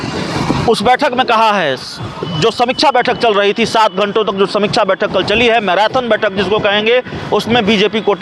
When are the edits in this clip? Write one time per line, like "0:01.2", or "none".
none